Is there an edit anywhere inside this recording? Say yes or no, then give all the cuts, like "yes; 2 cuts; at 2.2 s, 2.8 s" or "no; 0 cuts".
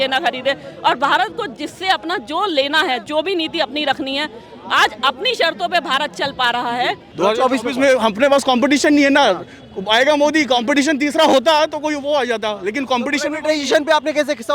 yes; 1 cut; at 7.1 s